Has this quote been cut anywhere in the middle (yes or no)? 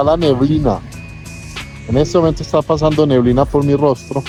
no